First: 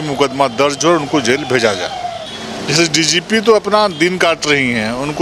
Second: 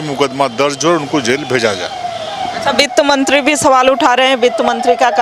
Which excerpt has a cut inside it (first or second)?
first